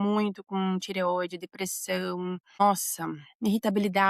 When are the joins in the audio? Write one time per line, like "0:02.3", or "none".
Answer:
0:02.6